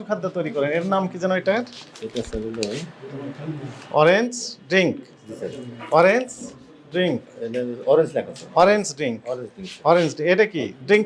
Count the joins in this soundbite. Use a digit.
0